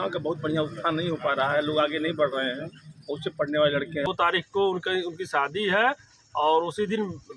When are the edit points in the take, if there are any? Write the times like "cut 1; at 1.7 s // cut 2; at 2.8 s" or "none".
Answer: cut 1; at 4.1 s